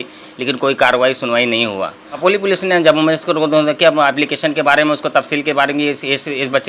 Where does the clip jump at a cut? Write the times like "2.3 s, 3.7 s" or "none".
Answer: 2.2 s